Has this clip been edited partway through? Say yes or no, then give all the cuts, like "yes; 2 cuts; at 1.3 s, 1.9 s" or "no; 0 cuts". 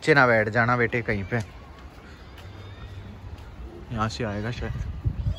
no; 0 cuts